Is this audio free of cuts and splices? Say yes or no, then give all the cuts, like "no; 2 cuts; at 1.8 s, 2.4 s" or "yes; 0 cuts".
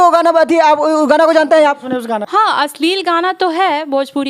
no; 1 cut; at 2.3 s